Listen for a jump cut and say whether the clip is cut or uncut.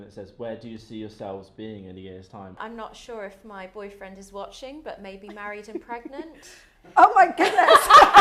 cut